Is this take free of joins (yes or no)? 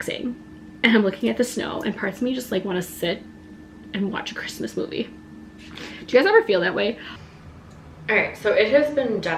no